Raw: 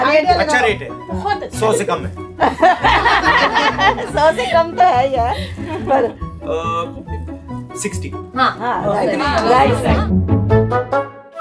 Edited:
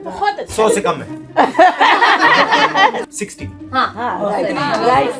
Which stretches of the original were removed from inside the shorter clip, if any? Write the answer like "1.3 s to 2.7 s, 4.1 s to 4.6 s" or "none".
4.1 s to 7.7 s